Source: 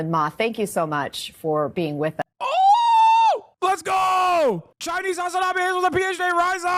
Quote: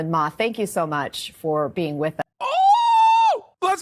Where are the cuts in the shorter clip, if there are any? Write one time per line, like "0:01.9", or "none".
none